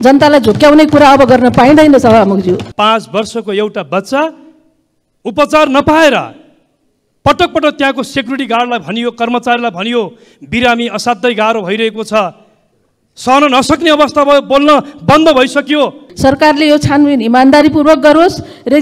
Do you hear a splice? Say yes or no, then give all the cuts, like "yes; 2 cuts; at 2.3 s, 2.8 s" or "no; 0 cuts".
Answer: yes; 2 cuts; at 2.7 s, 16.1 s